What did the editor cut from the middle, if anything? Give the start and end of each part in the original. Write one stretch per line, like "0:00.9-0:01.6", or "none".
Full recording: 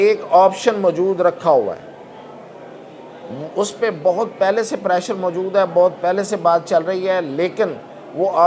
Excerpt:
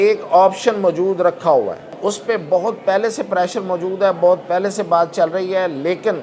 0:01.9-0:03.4

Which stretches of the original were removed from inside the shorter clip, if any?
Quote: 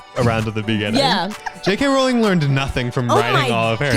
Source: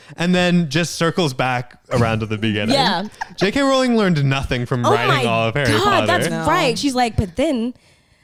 none

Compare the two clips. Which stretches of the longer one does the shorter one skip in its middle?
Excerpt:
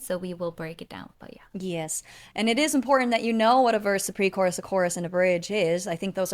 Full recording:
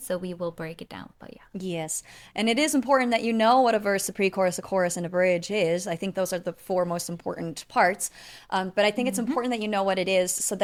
none

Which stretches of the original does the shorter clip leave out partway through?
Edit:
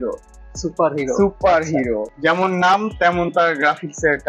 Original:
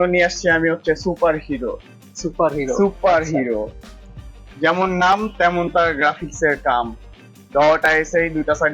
0:03.7-0:04.5

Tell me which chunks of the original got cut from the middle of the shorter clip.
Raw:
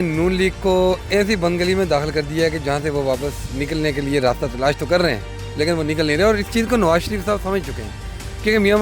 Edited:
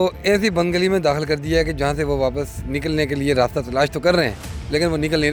none

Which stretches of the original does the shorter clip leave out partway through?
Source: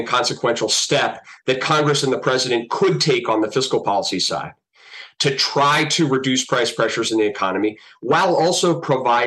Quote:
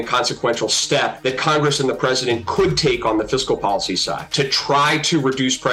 0:01.2-0:01.4
0:04.5-0:05.1

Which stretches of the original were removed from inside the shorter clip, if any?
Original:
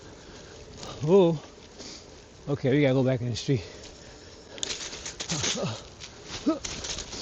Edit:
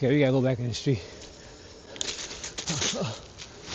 none

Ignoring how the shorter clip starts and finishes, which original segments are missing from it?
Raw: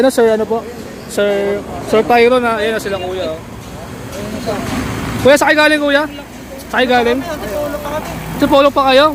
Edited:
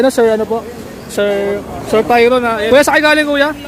0:02.7-0:05.2

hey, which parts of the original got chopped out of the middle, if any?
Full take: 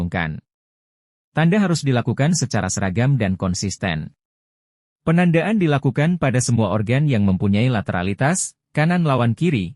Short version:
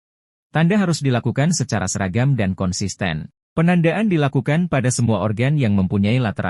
0:04.2-0:04.8

